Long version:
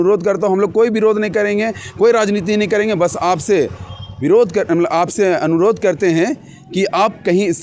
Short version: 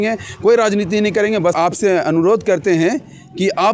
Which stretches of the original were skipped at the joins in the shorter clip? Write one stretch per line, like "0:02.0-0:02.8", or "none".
0:03.1-0:04.9